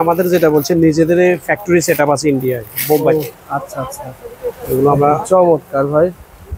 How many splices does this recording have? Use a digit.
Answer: 0